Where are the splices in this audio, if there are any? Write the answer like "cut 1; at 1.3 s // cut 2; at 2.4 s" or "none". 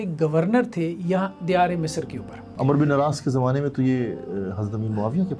cut 1; at 2.5 s